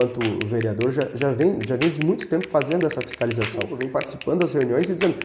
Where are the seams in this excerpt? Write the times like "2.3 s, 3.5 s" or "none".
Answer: 3.8 s